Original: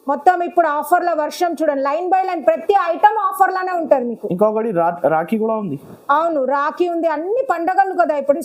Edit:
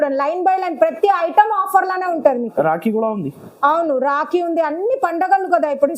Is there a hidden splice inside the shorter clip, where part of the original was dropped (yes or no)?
yes